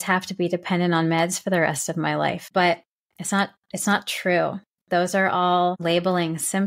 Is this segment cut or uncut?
cut